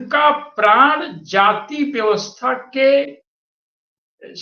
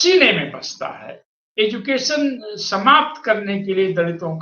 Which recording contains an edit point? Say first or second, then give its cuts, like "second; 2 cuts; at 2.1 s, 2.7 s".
second; 1 cut; at 1.5 s